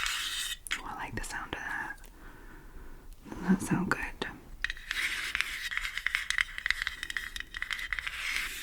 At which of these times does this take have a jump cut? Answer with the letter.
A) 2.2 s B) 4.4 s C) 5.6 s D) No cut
D